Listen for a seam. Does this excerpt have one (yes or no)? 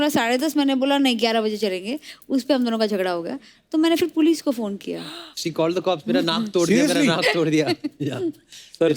no